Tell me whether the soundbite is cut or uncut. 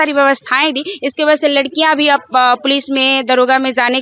uncut